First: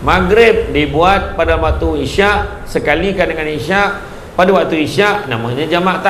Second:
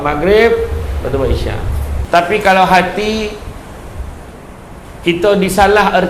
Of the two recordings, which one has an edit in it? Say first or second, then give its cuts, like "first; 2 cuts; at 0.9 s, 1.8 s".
second; 1 cut; at 1.9 s